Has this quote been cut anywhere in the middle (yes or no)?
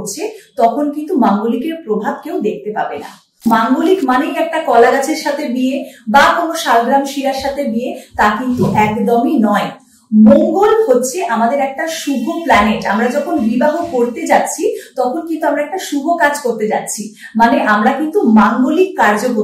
yes